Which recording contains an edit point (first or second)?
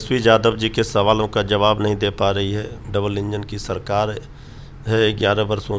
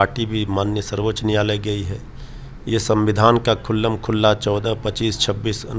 first